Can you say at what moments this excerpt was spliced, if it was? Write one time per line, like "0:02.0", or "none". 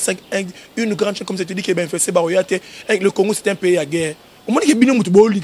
none

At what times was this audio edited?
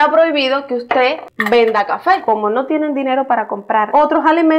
0:01.3
0:02.2

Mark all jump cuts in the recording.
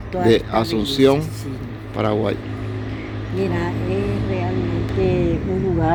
none

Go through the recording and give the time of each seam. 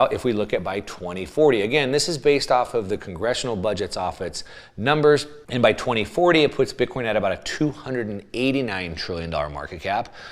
0:05.4

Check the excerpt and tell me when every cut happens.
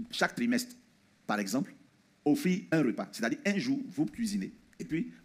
none

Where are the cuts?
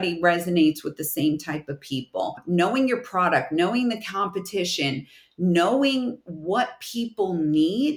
0:02.4

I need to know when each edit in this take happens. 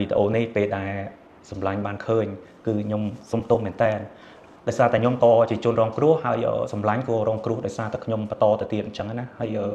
none

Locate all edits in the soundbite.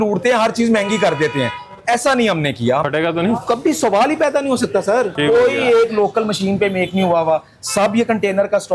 0:02.8
0:05.1

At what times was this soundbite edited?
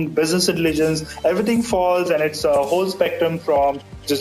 none

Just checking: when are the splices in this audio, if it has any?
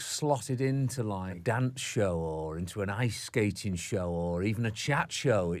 0:01.3

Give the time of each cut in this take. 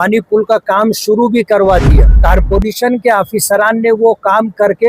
0:02.1

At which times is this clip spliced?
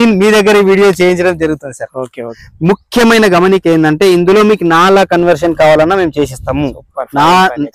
0:02.4

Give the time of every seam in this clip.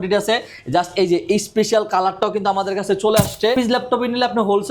0:03.5

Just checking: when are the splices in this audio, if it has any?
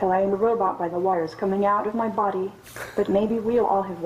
none

